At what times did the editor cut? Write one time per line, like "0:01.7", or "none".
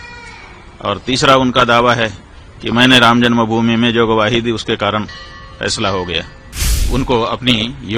0:06.9